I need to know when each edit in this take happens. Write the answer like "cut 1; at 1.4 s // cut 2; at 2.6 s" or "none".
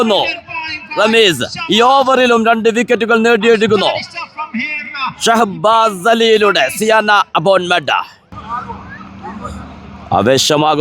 cut 1; at 8.3 s